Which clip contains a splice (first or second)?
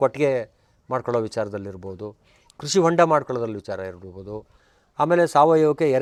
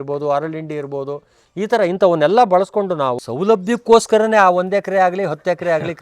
second